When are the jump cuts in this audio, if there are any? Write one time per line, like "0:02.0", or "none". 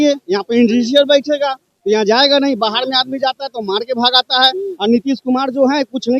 none